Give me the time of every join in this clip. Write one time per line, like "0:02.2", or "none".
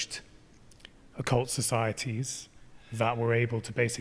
none